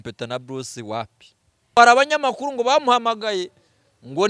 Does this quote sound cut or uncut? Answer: cut